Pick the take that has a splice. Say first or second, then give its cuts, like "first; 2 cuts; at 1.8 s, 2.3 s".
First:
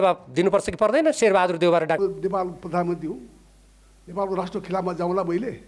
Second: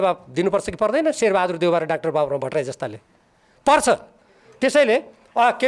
first; 1 cut; at 2.0 s